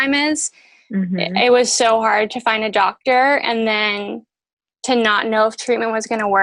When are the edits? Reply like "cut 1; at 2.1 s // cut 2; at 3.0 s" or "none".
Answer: none